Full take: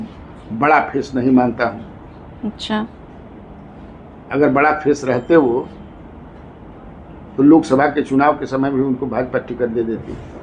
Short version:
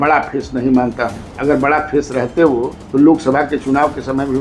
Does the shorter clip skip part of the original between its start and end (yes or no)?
yes